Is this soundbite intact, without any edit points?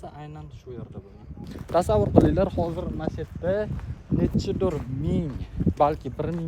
no; 1 cut; at 1.5 s

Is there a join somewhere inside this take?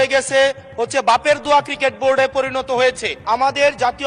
yes; 1 cut; at 3.1 s

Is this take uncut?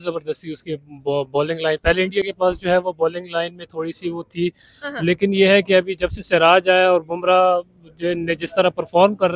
yes; 0 cuts

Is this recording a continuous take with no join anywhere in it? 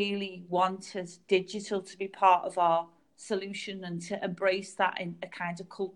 yes; 0 cuts

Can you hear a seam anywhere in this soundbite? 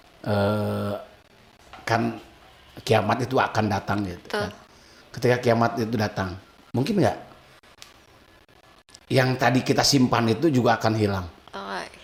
no; 0 cuts

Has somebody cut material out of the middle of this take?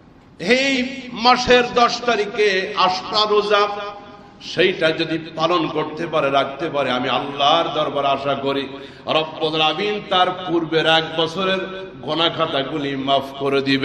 no; 0 cuts

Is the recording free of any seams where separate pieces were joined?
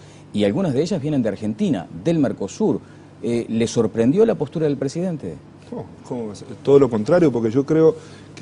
no; 1 cut; at 4.3 s

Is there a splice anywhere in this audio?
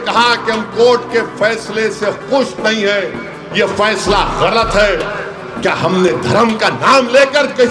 no; 0 cuts

